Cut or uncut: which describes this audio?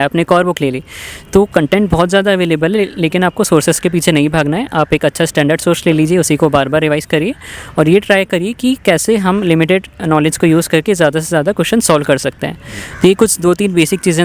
uncut